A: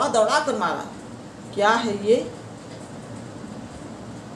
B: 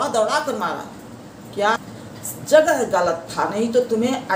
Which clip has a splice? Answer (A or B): B